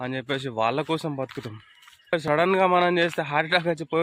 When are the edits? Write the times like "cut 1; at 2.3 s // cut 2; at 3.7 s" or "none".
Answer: cut 1; at 2.2 s